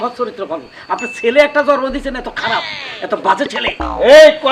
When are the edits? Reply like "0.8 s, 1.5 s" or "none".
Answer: none